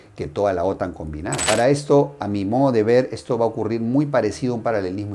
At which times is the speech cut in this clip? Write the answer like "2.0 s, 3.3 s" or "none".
1.4 s